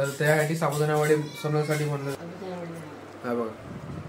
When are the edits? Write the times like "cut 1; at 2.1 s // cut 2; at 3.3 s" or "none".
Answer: cut 1; at 2.1 s